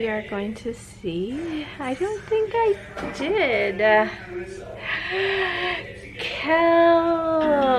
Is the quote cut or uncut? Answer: uncut